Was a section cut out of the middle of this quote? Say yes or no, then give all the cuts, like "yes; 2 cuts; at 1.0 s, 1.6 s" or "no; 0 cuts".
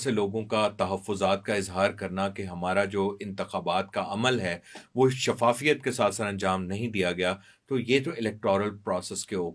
no; 0 cuts